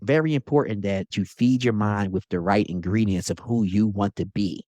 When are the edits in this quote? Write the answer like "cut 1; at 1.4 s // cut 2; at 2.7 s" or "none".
cut 1; at 1.1 s